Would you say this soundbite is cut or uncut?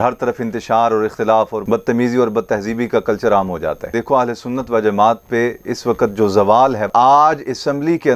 cut